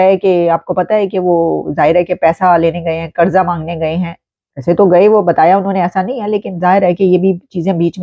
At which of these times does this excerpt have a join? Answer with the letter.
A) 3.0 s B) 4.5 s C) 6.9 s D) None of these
D